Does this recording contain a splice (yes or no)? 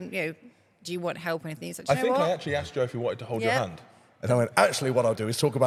no